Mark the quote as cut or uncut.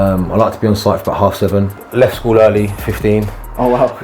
cut